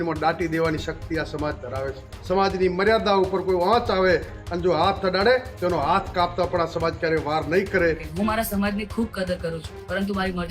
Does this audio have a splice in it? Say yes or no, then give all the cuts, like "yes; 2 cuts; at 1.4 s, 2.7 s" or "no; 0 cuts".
yes; 2 cuts; at 2.1 s, 8.1 s